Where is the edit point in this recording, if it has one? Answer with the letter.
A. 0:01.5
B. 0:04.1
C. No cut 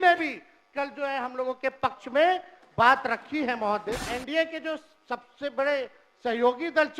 B